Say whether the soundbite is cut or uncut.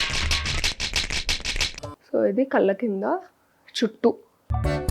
uncut